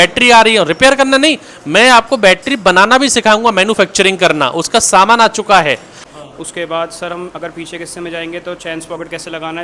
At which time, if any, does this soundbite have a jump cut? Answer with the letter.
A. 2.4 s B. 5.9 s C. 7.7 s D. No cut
B